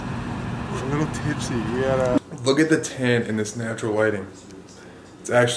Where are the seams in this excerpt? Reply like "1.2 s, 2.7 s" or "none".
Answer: 2.2 s